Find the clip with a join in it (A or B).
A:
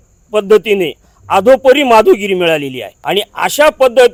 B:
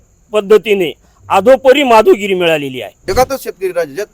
B